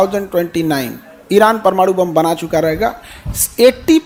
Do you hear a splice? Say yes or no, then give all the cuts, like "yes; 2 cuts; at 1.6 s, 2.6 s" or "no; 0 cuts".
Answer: no; 0 cuts